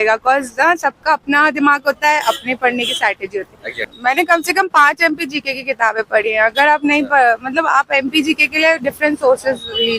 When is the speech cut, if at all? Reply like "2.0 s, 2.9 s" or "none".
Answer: 3.8 s